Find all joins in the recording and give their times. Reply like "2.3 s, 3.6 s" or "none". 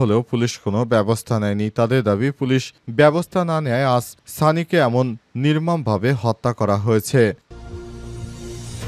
7.4 s

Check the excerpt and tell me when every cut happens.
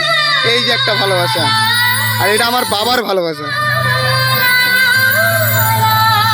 none

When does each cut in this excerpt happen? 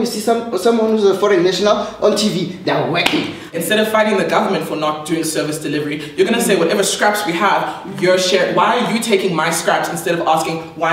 3.5 s

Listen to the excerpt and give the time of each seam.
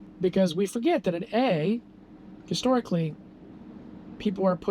none

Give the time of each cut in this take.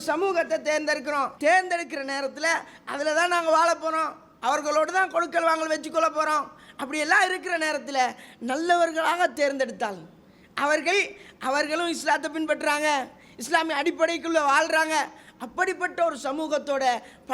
1.3 s

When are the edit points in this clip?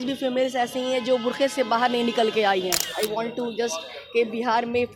2.8 s

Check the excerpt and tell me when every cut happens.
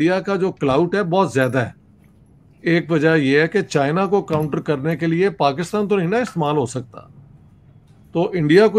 none

